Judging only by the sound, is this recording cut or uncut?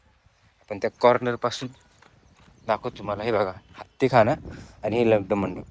uncut